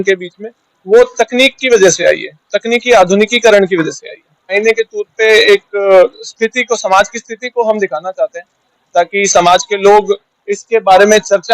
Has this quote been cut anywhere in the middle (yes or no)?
yes